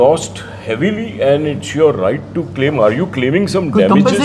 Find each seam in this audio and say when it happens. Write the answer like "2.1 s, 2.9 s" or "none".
none